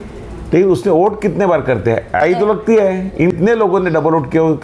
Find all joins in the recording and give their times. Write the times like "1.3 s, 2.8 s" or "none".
2.2 s, 3.3 s